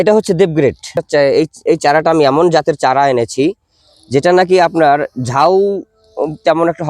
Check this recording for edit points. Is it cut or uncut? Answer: cut